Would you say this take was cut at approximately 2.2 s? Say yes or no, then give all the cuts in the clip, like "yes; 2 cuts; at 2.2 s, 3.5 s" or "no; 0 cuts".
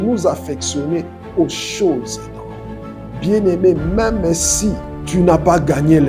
no; 1 cut; at 4.9 s